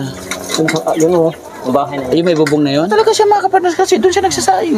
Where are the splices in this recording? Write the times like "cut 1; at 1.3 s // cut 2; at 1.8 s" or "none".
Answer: cut 1; at 2.9 s